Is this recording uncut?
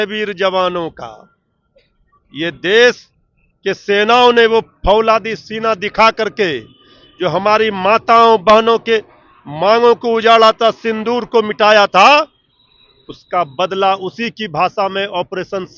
yes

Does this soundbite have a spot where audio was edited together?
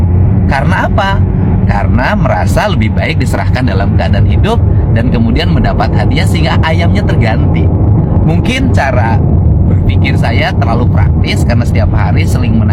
no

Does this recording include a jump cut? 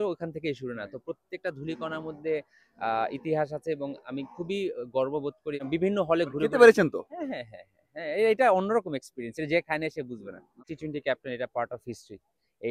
yes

